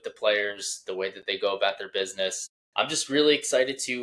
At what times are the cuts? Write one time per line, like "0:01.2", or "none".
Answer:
0:02.4